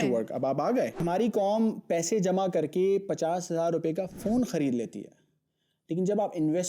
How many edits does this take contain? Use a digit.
1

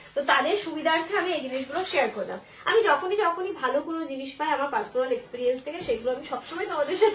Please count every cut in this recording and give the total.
0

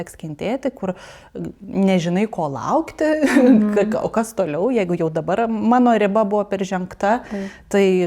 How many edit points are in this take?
0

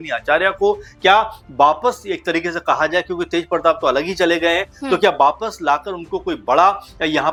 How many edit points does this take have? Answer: 0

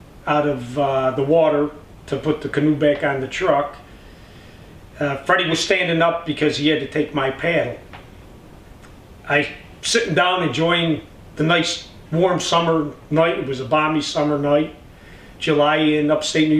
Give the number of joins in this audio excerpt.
1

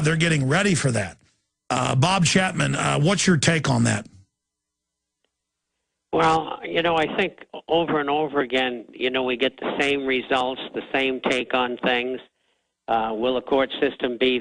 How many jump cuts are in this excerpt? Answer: 1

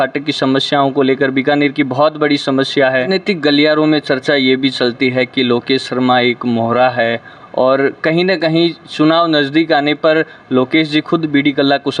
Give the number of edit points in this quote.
1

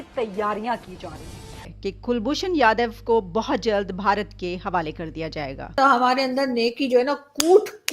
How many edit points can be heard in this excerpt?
2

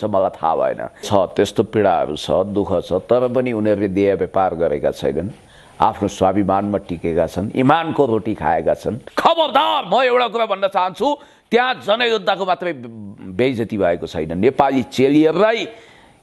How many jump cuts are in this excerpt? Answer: 2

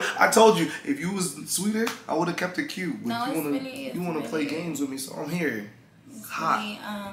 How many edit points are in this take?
1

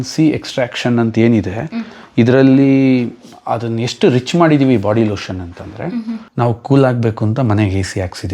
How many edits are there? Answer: 1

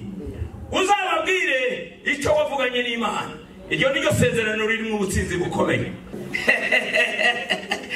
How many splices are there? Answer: 1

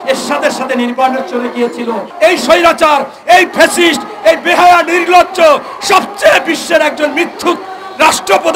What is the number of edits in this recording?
1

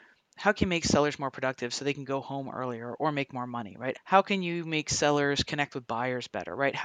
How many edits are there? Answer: 1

